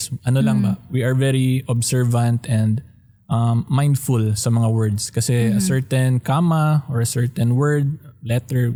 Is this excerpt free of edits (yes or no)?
yes